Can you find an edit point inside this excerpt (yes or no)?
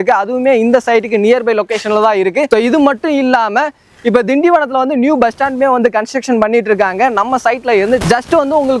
no